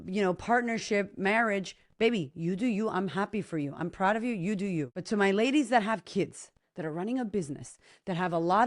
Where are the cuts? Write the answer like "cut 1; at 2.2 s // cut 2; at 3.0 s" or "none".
cut 1; at 5.0 s